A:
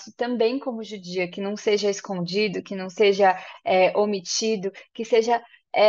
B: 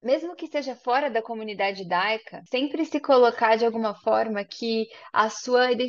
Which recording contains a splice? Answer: B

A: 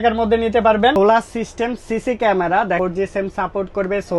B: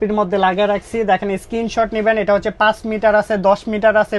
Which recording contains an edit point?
A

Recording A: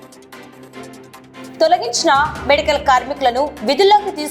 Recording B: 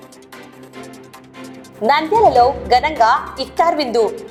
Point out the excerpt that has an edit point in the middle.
A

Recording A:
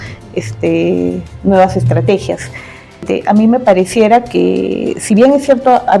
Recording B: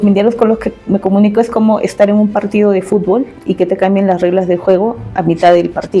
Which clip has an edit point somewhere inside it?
A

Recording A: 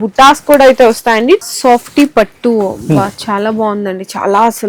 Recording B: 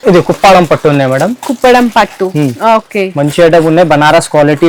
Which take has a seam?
A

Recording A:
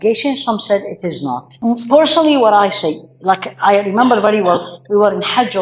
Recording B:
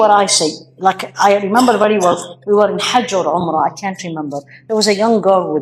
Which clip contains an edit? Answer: A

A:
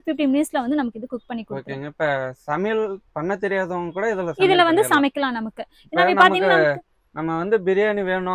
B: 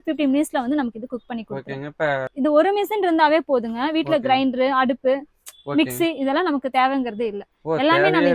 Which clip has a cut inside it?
B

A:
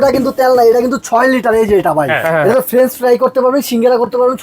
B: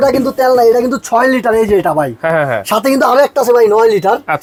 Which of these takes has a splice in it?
A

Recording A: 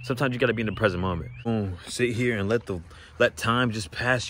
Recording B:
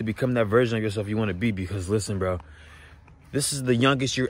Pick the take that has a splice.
A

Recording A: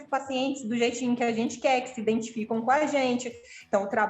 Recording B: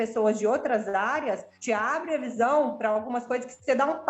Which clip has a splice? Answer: B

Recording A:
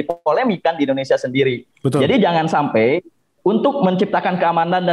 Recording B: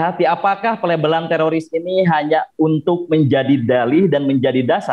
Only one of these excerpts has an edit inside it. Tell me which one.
A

